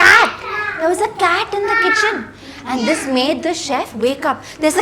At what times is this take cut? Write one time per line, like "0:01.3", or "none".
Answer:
none

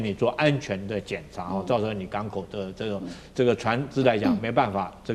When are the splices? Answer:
none

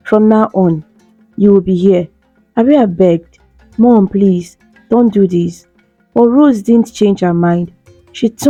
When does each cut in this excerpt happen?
none

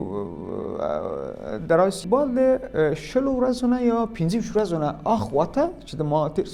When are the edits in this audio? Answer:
0:02.0

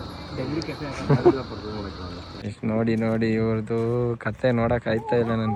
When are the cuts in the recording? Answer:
none

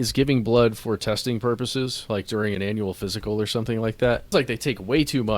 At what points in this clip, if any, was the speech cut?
0:04.2

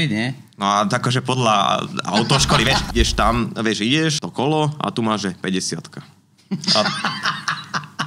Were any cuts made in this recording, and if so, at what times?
0:02.8
0:04.2

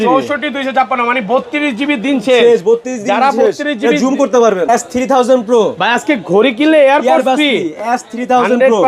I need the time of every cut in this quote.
0:04.7

